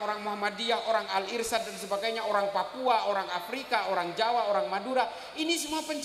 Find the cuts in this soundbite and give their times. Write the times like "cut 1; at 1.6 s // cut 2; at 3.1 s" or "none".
none